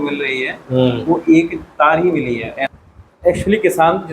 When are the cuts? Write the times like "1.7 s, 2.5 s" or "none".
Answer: 2.6 s